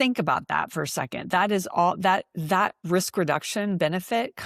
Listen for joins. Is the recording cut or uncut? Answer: cut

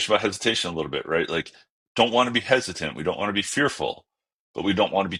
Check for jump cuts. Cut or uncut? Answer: uncut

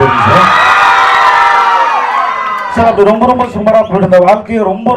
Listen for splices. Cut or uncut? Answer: uncut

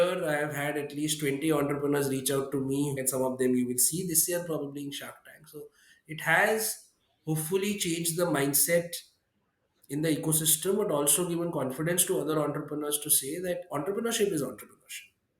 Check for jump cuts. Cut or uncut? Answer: cut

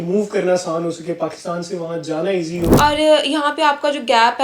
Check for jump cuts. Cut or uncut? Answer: cut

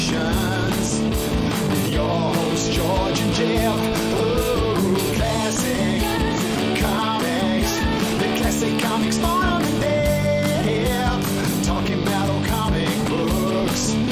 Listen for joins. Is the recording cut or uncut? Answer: uncut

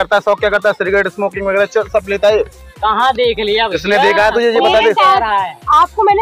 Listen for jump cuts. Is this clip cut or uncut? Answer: uncut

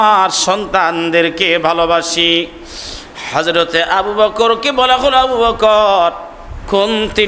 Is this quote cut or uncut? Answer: uncut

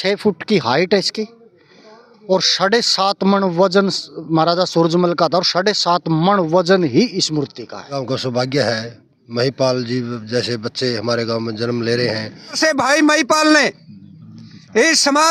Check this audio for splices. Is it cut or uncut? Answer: cut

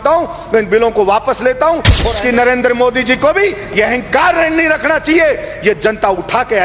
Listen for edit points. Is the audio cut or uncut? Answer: cut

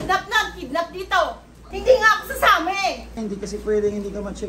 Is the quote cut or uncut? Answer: cut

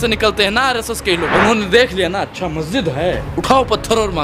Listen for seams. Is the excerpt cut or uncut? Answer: cut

